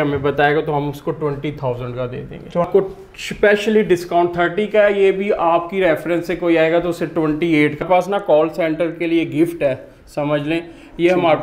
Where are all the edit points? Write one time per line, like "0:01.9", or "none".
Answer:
0:02.7
0:07.8